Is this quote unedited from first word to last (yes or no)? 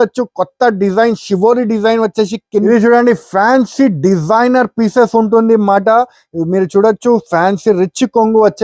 no